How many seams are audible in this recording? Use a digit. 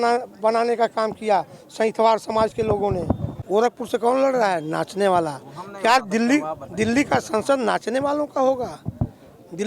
1